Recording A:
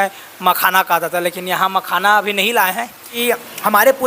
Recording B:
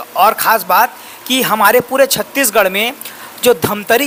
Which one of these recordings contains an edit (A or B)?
A